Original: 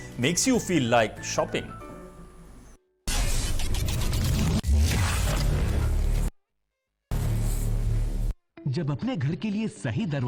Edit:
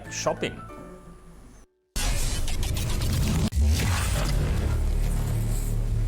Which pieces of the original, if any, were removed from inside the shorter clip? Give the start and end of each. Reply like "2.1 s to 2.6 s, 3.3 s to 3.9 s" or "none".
6.3 s to 7.1 s